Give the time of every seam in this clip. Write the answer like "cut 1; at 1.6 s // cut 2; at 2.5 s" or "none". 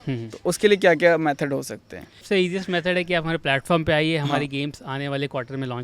cut 1; at 2.2 s